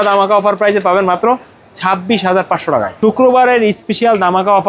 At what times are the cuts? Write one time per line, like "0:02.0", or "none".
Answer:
0:02.9